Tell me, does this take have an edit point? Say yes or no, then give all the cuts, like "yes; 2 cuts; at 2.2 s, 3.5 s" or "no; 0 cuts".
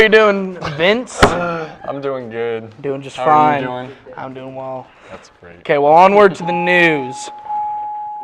no; 0 cuts